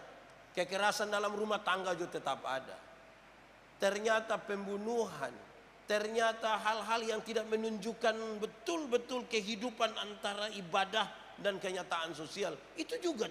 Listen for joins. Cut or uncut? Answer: uncut